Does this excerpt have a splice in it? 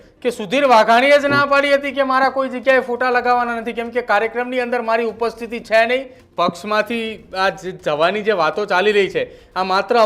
yes; 1 cut; at 6.2 s

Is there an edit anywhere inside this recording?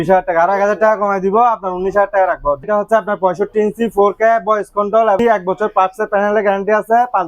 yes; 2 cuts; at 2.6 s, 5.2 s

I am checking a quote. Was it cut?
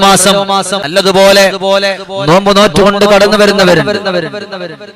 yes; 1 cut; at 1.1 s

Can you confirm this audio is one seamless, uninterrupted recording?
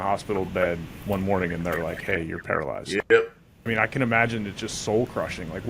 no; 1 cut; at 3.5 s

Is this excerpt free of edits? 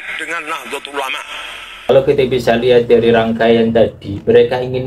no; 1 cut; at 1.9 s

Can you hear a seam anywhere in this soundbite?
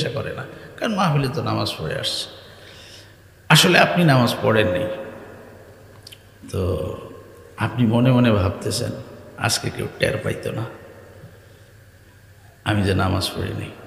no; 0 cuts

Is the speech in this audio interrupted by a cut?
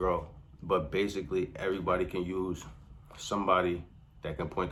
no; 0 cuts

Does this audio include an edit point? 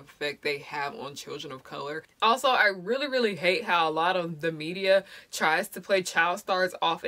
yes; 1 cut; at 2.1 s

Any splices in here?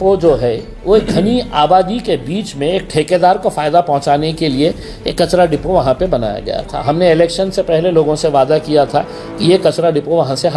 no; 0 cuts

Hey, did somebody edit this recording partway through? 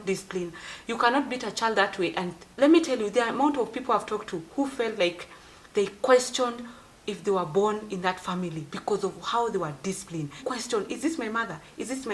yes; 2 cuts; at 2.4 s, 10.4 s

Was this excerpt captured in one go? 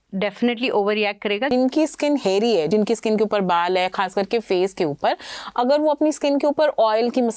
no; 2 cuts; at 1.5 s, 2.7 s

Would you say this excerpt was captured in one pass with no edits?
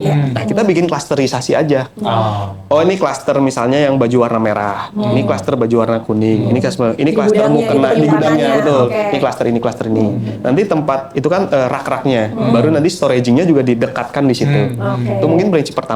yes; 0 cuts

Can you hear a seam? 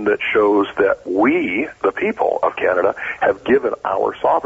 no; 0 cuts

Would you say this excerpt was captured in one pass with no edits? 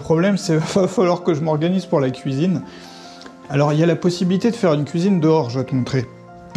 yes; 0 cuts

